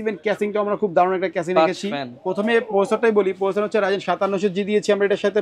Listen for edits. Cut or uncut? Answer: uncut